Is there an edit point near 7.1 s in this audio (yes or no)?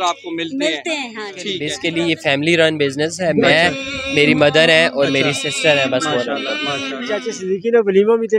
yes